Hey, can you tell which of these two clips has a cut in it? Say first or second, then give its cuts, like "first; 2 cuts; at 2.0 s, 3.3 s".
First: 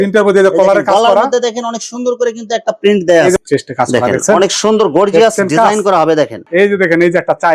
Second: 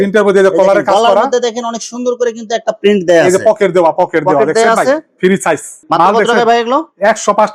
first; 2 cuts; at 3.4 s, 6.4 s